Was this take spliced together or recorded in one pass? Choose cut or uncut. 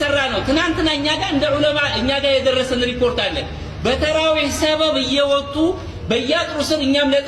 uncut